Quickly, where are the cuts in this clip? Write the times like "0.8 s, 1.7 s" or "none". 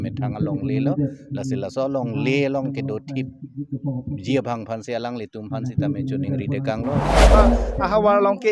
7.3 s

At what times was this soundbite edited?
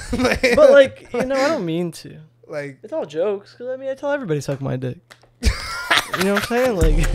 none

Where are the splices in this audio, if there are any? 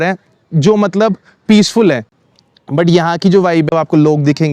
none

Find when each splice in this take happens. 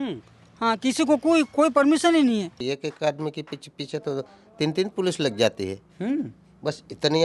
2.6 s

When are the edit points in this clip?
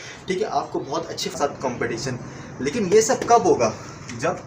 1.4 s

